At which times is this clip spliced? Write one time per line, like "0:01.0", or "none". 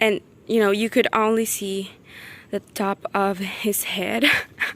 none